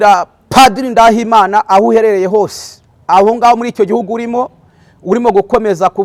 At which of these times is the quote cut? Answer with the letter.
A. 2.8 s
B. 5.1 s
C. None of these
C